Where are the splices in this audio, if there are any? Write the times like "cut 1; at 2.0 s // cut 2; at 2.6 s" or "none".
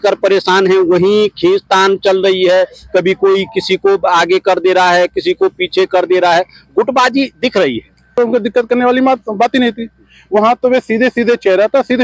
cut 1; at 8.1 s